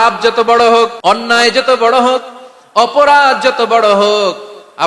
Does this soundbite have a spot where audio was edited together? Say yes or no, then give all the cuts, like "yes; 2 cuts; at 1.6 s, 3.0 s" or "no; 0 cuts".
yes; 1 cut; at 1.0 s